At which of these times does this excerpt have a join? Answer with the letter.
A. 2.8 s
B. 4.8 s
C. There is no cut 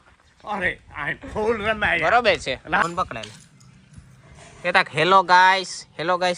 A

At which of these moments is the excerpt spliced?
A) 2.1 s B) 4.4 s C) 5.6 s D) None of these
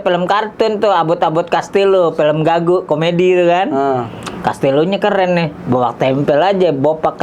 D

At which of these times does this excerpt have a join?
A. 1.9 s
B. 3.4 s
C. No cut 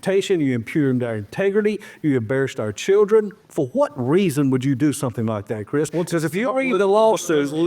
B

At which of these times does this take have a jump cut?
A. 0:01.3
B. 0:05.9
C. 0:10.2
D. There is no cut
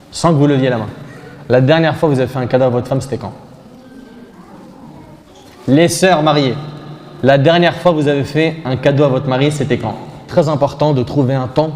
C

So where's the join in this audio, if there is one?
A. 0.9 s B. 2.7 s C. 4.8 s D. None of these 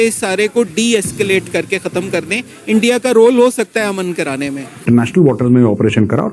C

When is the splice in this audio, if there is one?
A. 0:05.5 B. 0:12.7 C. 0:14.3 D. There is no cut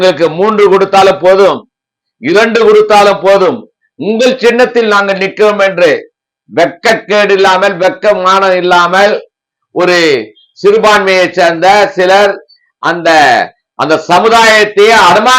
D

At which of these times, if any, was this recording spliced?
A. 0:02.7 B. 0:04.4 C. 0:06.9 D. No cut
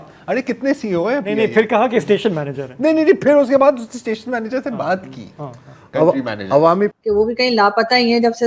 C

